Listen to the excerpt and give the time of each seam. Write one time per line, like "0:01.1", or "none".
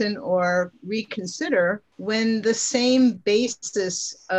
0:01.9